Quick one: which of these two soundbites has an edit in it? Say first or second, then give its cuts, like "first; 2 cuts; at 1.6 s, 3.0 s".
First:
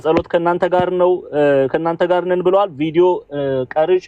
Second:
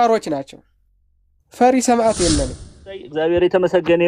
second; 1 cut; at 2.7 s